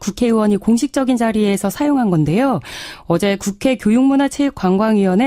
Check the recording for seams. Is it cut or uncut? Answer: cut